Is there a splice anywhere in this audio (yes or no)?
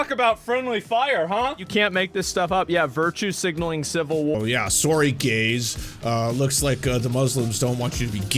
yes